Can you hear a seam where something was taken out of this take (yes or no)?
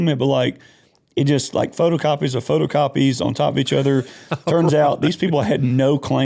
no